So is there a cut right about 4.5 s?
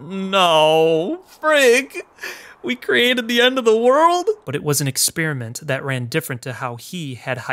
yes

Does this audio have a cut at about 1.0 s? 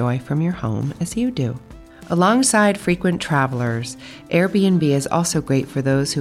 no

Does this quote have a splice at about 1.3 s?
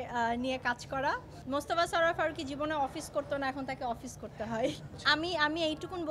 yes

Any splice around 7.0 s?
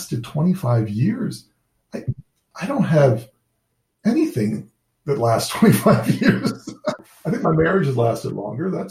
yes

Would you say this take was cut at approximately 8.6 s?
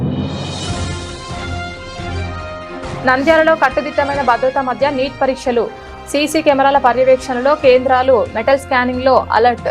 no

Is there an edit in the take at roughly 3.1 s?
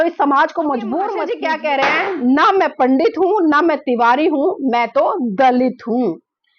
no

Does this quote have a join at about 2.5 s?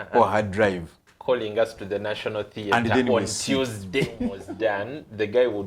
no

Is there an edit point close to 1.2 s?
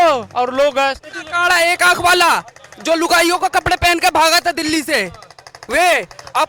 yes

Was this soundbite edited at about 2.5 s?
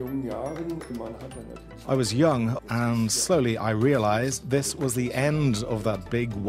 yes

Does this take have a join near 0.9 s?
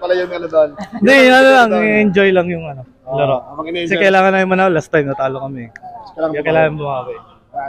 no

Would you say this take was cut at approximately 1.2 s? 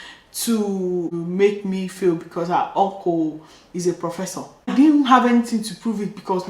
yes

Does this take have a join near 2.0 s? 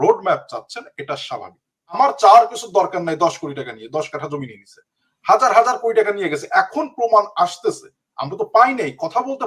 yes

